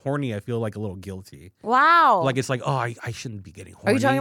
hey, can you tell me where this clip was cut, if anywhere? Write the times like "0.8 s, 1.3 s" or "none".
none